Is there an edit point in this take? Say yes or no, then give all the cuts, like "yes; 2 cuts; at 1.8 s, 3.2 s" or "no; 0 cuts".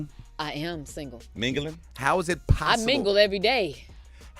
yes; 1 cut; at 2.4 s